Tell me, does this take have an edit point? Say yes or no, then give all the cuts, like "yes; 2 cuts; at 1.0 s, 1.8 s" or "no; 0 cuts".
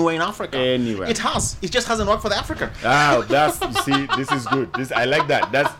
no; 0 cuts